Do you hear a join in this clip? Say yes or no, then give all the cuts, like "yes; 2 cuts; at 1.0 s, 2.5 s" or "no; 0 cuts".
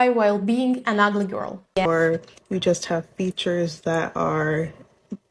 yes; 1 cut; at 1.9 s